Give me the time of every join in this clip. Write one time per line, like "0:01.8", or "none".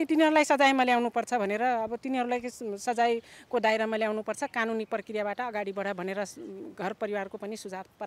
none